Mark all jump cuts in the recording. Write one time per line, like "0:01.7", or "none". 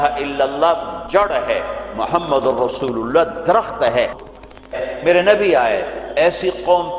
0:04.2